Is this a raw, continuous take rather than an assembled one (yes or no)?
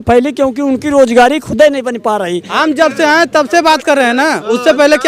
no